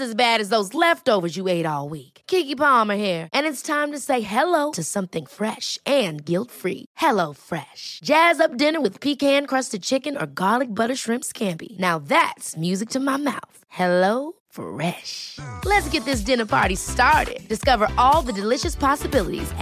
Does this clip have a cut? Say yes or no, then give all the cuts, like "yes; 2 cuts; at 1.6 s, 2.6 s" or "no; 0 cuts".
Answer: no; 0 cuts